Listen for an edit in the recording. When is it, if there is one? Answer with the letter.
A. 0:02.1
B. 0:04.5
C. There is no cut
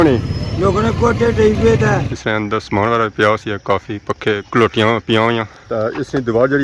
A